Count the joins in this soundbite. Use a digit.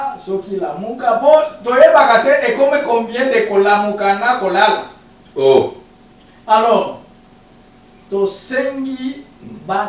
0